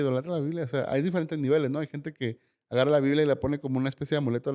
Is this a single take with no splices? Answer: yes; 0 cuts

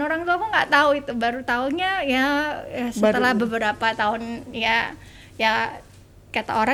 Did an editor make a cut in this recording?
no; 0 cuts

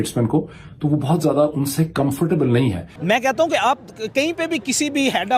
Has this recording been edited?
yes; 1 cut; at 2.9 s

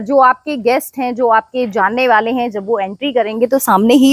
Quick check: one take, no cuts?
yes; 0 cuts

